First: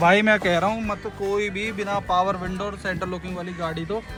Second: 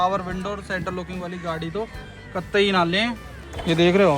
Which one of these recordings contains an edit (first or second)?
second